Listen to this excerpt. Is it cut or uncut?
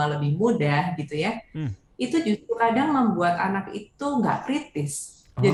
uncut